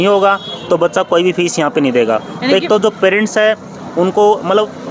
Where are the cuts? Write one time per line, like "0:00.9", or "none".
none